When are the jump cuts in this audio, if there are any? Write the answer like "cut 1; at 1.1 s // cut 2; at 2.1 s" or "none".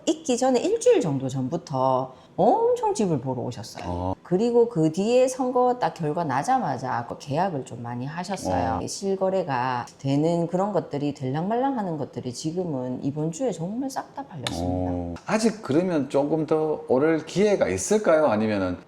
cut 1; at 4.1 s // cut 2; at 8.9 s // cut 3; at 15.1 s